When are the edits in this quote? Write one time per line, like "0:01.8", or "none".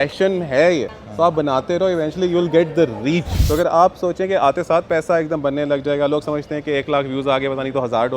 0:01.0
0:03.3